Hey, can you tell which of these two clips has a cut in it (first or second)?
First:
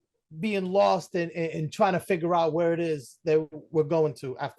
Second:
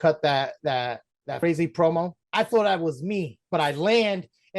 second